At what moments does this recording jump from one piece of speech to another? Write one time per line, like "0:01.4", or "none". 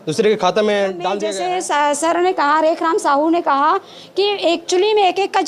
0:01.2

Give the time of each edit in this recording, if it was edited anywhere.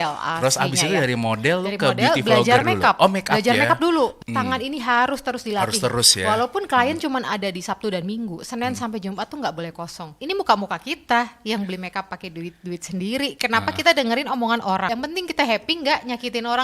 0:04.2
0:10.1
0:14.9

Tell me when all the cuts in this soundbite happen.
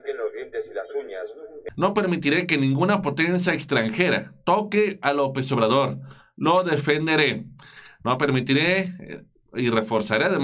0:01.6

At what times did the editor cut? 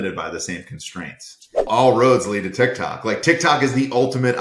0:01.7

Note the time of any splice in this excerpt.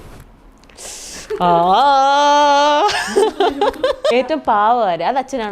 0:04.1

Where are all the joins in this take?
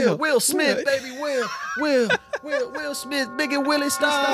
none

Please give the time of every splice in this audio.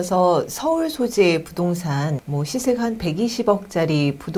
0:02.2

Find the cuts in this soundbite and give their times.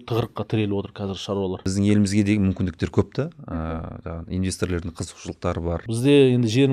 0:01.6
0:05.8

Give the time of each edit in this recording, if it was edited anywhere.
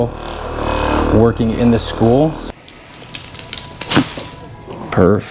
0:02.4

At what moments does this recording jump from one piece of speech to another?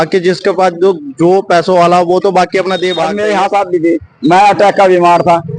0:03.0

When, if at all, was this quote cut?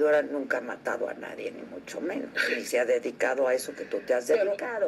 none

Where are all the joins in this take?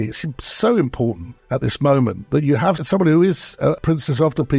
0:01.3
0:02.8
0:03.8

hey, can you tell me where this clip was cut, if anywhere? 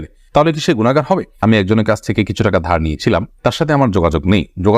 0:01.4

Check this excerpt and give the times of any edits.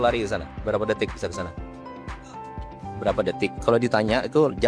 0:01.5
0:03.0

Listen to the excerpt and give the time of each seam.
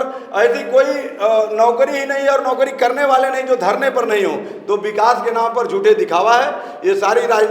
none

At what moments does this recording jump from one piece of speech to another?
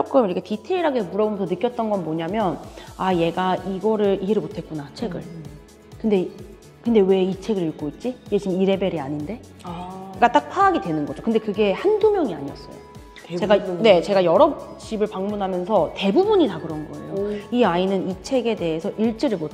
none

